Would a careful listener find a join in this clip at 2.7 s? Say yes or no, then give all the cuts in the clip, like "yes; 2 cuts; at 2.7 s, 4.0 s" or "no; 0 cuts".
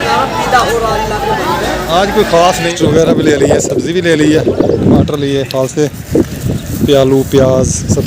yes; 1 cut; at 2.7 s